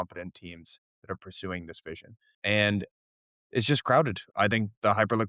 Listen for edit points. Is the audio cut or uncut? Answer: cut